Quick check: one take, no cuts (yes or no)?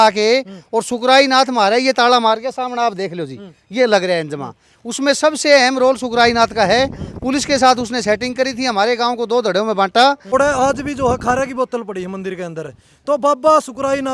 no